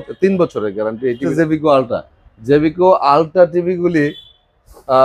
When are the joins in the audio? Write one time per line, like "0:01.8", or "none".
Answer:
0:01.3